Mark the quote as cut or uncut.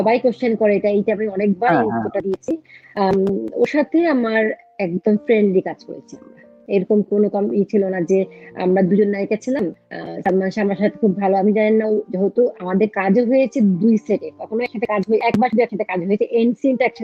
uncut